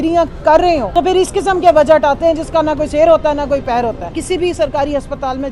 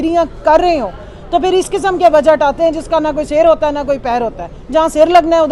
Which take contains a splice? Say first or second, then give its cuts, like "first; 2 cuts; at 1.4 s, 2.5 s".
first; 2 cuts; at 0.9 s, 4.1 s